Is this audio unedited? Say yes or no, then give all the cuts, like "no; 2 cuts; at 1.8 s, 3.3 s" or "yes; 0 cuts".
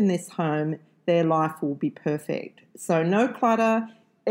yes; 0 cuts